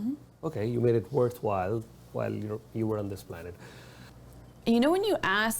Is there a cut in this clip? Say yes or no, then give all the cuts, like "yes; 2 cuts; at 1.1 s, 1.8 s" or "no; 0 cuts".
yes; 1 cut; at 4.1 s